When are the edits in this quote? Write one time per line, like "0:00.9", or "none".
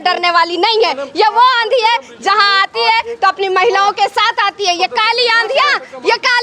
none